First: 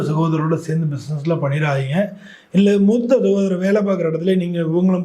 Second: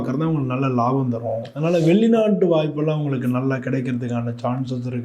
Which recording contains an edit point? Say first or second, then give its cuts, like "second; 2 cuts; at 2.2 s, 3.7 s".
second; 1 cut; at 1.5 s